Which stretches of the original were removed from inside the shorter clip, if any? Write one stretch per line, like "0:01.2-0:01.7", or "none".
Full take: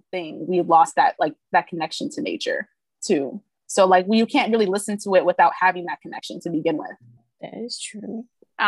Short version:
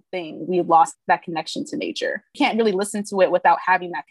0:00.9-0:01.4
0:02.8-0:04.3